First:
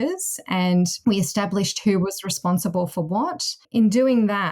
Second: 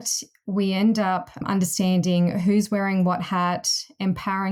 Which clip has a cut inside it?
first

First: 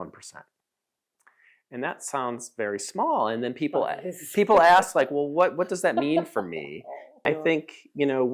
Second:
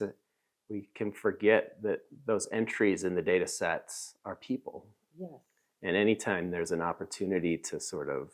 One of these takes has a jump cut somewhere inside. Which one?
first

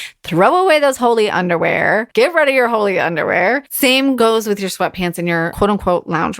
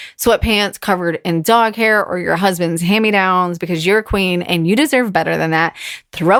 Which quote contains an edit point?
first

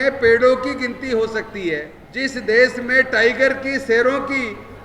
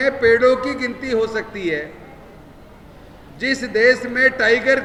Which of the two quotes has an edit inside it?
first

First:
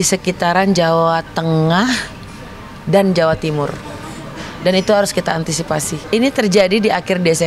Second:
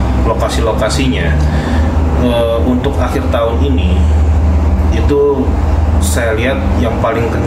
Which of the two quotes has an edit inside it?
first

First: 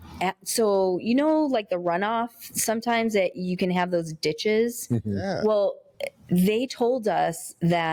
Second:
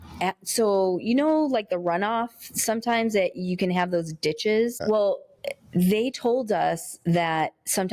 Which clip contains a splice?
second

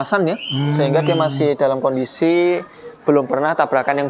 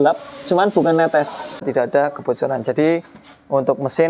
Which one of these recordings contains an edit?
second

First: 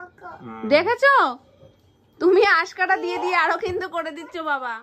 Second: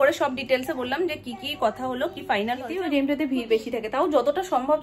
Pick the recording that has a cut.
second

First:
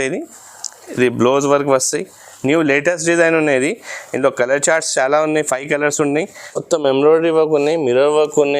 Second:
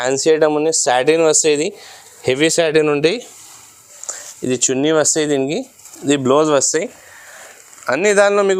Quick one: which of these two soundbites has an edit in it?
first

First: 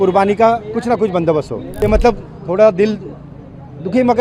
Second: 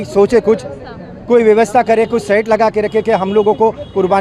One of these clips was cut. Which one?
first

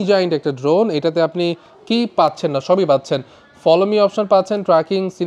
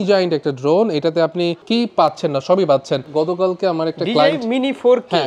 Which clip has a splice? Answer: second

